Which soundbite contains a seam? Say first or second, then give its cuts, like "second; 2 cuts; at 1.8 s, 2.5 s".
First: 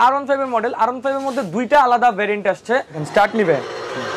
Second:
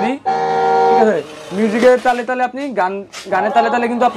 first; 1 cut; at 3.0 s